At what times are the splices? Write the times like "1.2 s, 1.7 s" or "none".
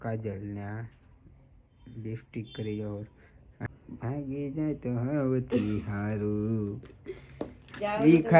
3.7 s